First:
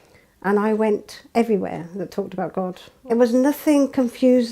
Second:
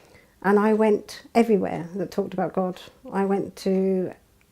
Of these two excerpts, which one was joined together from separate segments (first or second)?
first